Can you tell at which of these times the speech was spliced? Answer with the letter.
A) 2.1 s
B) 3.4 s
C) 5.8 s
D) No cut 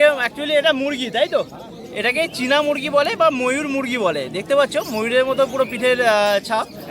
D